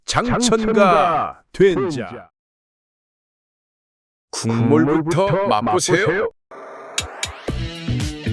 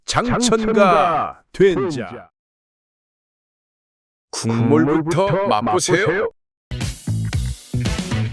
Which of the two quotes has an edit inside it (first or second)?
second